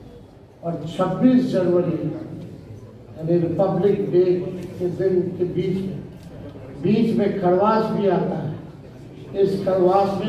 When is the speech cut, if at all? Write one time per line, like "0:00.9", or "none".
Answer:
none